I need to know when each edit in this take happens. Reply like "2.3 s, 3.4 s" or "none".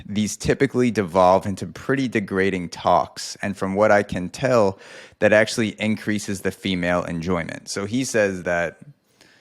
none